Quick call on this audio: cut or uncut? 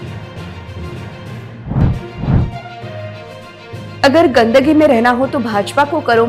cut